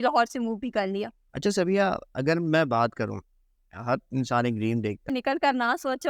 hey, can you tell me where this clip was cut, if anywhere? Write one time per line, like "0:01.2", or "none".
0:01.2
0:05.1